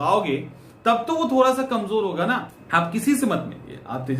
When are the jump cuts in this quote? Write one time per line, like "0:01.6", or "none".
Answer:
0:02.5